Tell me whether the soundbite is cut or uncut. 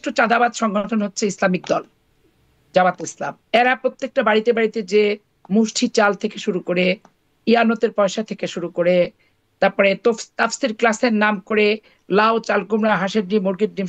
uncut